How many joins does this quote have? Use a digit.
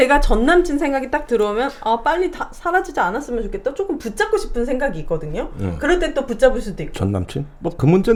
0